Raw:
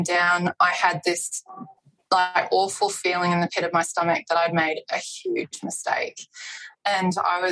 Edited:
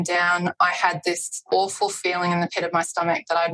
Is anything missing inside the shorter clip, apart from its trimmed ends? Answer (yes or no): yes